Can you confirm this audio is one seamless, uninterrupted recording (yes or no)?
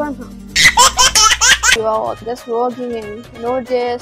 no